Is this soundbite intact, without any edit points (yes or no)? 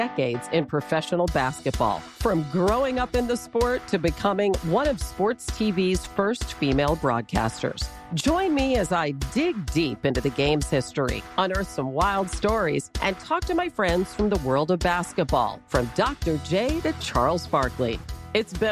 yes